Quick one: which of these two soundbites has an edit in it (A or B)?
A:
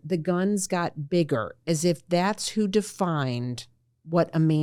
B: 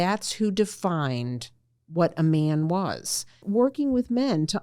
B